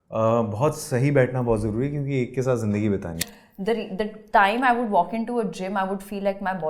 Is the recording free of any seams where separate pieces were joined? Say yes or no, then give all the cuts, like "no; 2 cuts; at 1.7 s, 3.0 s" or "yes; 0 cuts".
no; 1 cut; at 3.2 s